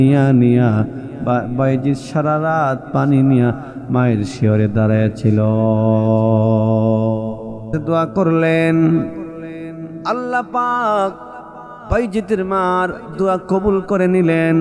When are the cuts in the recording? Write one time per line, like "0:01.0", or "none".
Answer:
0:07.8